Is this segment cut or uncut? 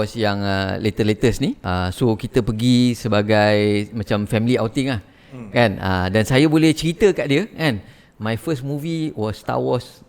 cut